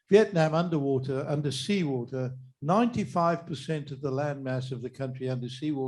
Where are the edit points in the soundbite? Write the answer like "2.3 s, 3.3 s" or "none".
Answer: none